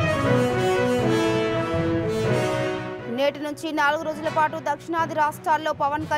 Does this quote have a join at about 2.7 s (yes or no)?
yes